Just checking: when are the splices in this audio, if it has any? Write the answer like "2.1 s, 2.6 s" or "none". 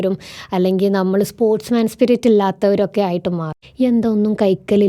3.6 s